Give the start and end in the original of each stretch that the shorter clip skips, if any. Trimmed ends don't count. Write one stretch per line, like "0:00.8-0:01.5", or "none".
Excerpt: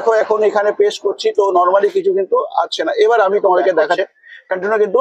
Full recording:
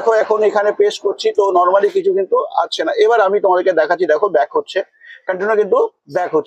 0:04.0-0:04.7